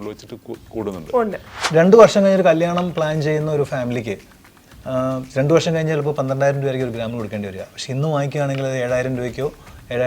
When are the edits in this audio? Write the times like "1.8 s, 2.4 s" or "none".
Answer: 1.6 s